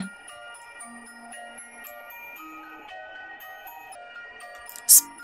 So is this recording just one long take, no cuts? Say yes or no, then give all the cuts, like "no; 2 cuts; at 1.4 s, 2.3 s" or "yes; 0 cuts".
no; 1 cut; at 3.9 s